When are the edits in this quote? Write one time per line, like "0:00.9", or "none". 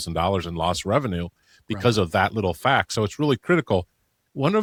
none